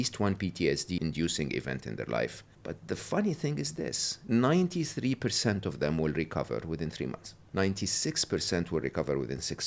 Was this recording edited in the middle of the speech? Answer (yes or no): yes